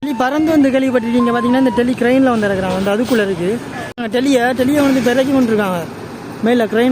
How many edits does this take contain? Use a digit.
1